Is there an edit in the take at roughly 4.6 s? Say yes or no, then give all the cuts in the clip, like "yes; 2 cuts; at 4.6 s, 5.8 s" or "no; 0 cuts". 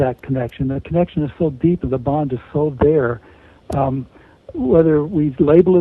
no; 1 cut; at 1.8 s